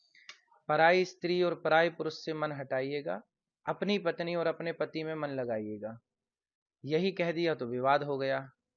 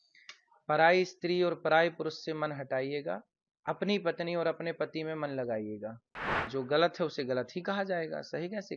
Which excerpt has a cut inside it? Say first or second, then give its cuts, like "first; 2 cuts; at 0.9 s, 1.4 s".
second; 1 cut; at 6.4 s